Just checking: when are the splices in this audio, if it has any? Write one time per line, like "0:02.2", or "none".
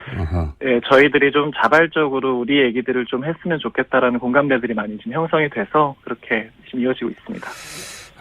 0:03.8